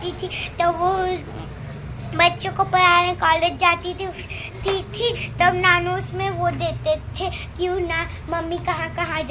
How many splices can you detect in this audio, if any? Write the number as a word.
zero